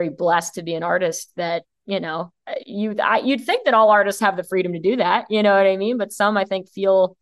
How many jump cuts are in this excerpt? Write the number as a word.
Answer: one